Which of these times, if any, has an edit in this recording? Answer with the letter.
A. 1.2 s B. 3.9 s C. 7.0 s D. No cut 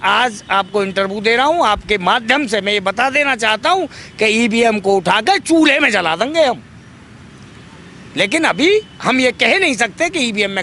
D